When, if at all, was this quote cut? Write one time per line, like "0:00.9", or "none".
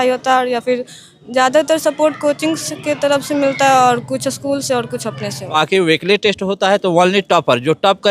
0:05.6